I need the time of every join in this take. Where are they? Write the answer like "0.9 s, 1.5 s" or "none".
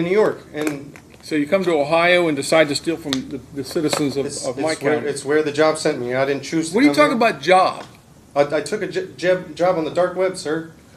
none